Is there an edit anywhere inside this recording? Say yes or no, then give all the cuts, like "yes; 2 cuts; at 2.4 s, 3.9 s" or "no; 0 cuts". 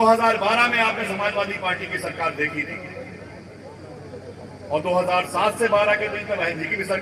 no; 0 cuts